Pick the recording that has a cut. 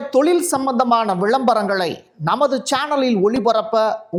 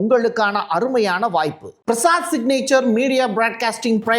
second; 1 cut; at 1.7 s

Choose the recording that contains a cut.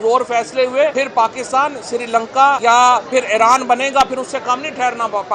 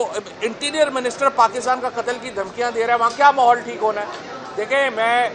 first; 2 cuts; at 0.9 s, 2.6 s

